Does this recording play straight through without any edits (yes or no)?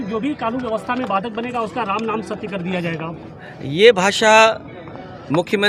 yes